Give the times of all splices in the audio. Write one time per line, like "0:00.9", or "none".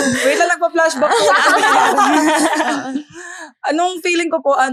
none